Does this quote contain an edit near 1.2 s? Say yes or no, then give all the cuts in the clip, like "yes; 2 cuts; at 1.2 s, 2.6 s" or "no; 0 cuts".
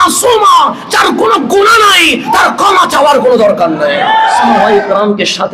no; 1 cut; at 4.6 s